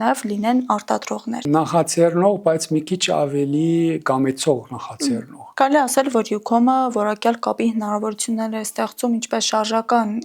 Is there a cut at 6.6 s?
no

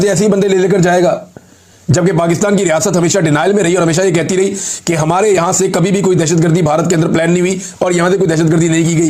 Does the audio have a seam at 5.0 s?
no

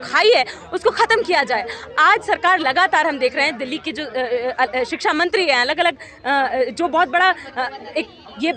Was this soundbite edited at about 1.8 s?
no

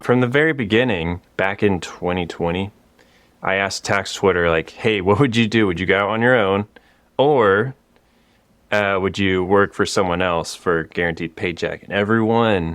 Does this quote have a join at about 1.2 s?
yes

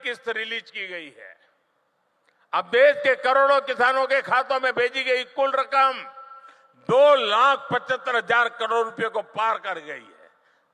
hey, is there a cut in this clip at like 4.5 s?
no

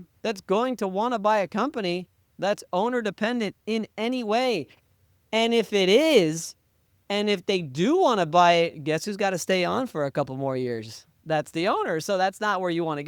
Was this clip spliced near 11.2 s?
yes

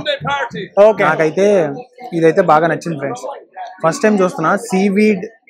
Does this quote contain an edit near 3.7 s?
no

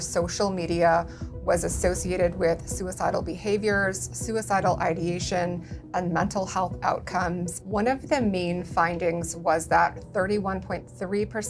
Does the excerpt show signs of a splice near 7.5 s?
yes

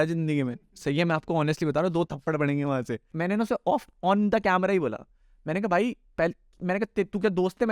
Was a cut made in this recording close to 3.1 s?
yes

